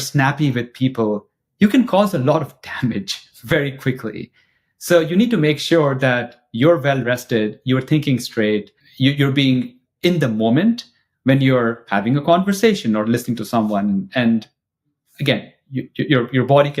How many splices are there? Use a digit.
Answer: 1